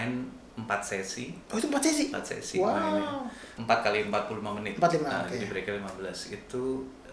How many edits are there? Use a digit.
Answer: 1